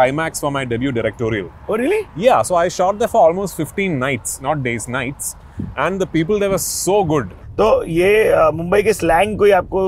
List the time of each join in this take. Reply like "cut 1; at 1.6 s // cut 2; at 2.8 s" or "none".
cut 1; at 7.3 s